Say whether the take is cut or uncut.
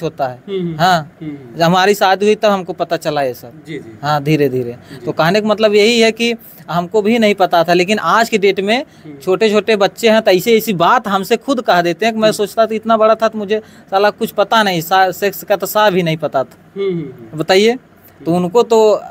uncut